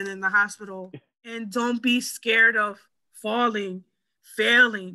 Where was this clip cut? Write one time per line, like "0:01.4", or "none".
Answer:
0:01.0